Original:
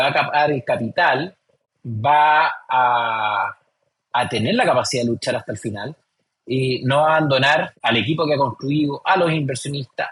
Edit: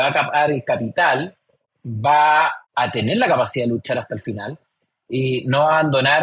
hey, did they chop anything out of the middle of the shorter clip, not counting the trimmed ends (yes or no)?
yes